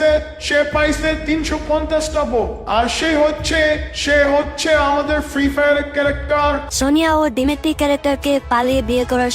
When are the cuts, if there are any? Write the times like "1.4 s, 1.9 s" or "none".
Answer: 6.7 s